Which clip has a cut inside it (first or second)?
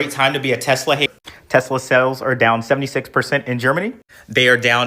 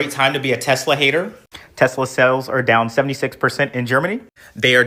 first